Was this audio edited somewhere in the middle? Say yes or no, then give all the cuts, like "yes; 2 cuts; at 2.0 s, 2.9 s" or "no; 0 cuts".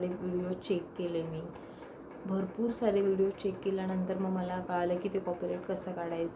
no; 0 cuts